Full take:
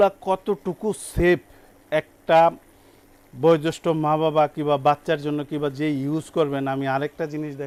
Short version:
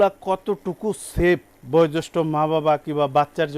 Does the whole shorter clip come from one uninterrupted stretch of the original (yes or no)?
no